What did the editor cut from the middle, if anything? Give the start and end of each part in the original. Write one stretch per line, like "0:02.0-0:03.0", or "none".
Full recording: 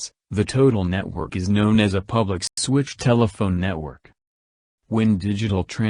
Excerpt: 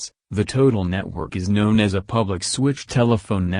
0:02.4-0:02.5

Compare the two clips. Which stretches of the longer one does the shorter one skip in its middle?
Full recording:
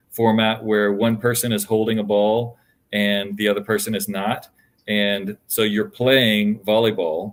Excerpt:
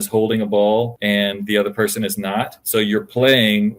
0:02.5-0:02.9
0:04.5-0:05.4

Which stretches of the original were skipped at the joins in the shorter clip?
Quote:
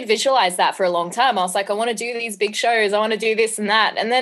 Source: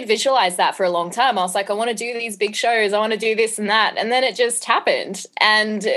none

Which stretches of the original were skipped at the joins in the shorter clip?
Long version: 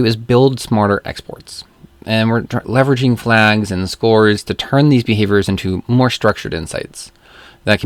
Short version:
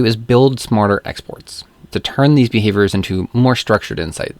0:01.9-0:04.5

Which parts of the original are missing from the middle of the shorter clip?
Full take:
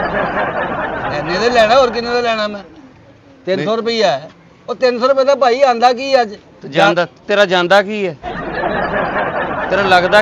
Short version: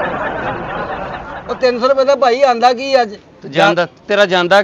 0:01.5-0:04.1

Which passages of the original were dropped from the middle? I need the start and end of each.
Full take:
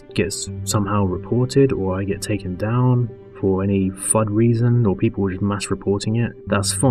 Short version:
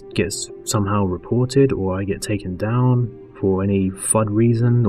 none

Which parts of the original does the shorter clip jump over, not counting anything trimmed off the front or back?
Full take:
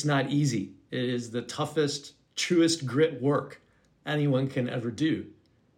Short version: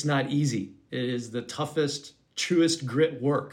none

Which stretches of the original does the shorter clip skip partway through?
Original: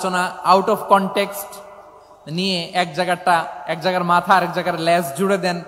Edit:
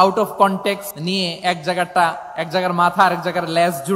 0:01.4-0:02.2

